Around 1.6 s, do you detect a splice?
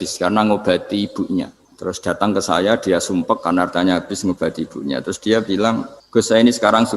yes; 2 cuts; at 1.6 s, 5.9 s

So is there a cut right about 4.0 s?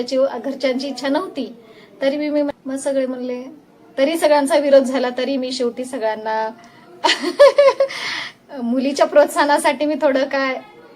no; 1 cut; at 2.5 s

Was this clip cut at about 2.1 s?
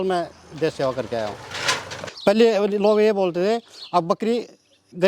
yes; 1 cut; at 2.1 s

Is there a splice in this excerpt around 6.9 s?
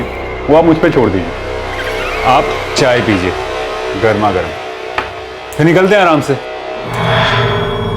yes; 1 cut; at 6.9 s

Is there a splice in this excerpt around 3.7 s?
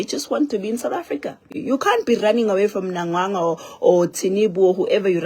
no; 1 cut; at 1.5 s

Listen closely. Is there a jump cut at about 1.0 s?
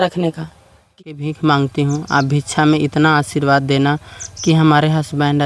yes; 1 cut; at 1.0 s

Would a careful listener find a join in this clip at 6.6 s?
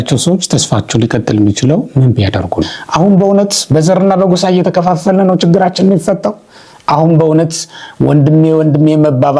no; 1 cut; at 2.8 s

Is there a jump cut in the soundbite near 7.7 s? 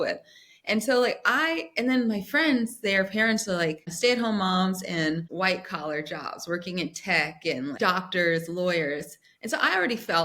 yes; 3 cuts; at 3.9 s, 5.3 s, 7.7 s

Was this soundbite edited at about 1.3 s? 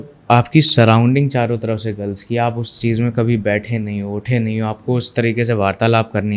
no; 0 cuts

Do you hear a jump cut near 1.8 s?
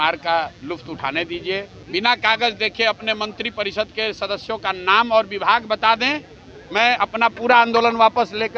yes; 1 cut; at 1.8 s

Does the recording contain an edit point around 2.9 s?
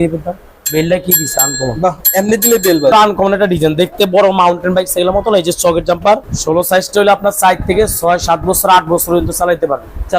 yes; 2 cuts; at 2.9 s, 6.3 s

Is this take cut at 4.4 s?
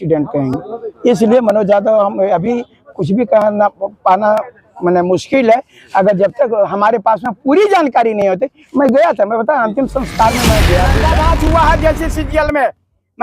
no; 1 cut; at 11.0 s

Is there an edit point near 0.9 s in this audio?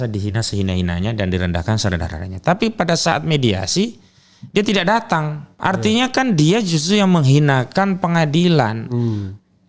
no; 1 cut; at 5.6 s

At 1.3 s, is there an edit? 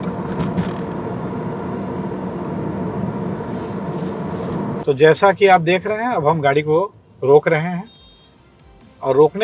no; 0 cuts

